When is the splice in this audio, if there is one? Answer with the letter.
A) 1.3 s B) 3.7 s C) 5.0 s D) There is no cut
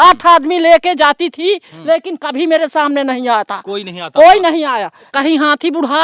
C